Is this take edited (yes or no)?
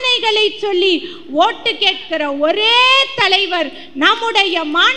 no